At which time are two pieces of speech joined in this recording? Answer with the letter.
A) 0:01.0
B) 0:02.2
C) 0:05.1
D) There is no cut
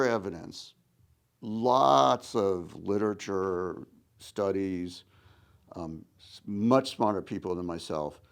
D